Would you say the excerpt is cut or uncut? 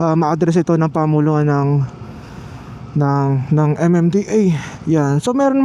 uncut